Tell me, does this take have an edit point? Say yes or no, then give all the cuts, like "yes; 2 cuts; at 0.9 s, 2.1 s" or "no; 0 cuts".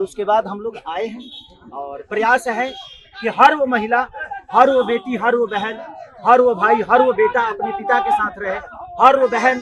no; 0 cuts